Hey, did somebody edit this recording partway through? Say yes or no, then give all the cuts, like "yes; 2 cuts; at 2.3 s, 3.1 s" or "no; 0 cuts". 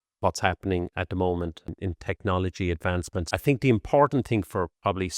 yes; 2 cuts; at 1.7 s, 3.3 s